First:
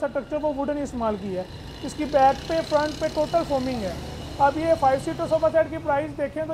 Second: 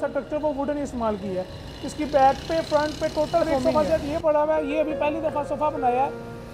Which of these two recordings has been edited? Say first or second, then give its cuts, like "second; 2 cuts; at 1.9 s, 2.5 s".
second; 1 cut; at 3.5 s